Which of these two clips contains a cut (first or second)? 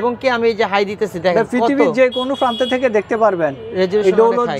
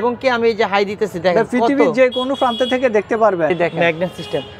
second